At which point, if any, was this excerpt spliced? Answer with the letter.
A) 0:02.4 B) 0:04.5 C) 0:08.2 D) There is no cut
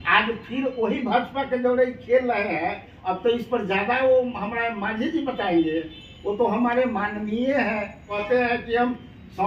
C